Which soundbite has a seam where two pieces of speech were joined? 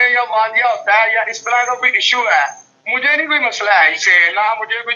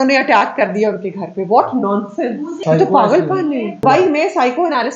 second; 2 cuts; at 2.6 s, 3.8 s

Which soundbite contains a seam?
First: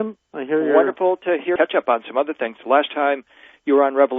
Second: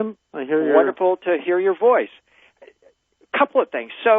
second; 1 cut; at 1.6 s

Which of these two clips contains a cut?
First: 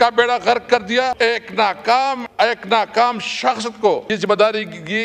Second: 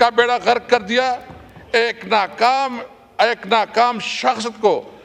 first; 3 cuts; at 1.2 s, 2.2 s, 4.1 s

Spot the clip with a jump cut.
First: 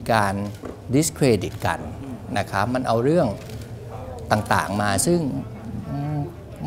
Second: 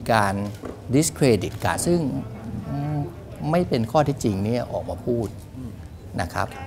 second; 1 cut; at 1.8 s

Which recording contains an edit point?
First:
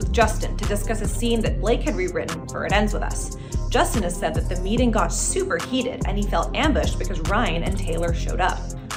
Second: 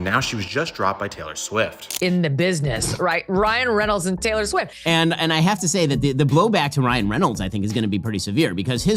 second; 1 cut; at 1.8 s

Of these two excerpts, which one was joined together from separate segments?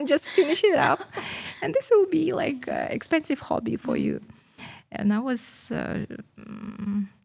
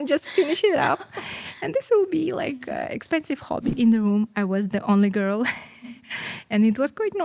second; 1 cut; at 3.7 s

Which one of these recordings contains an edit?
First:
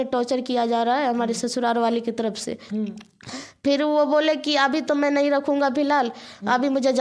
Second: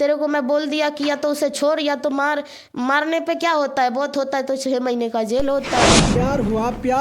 second; 1 cut; at 6.1 s

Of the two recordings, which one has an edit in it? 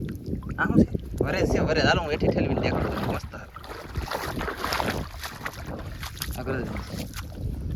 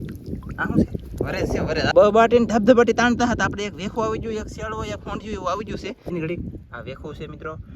second; 2 cuts; at 1.9 s, 6.1 s

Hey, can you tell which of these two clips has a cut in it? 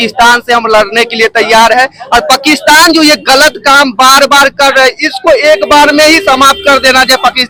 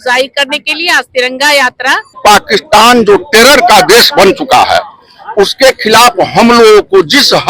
second; 1 cut; at 2.2 s

